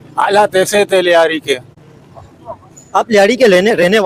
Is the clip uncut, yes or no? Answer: yes